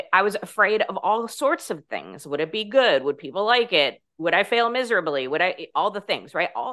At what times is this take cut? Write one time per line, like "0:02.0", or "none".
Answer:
0:04.0